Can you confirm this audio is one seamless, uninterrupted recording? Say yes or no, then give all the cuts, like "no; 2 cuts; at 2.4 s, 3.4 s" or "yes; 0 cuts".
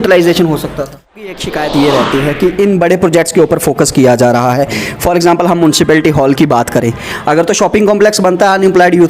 no; 1 cut; at 1.3 s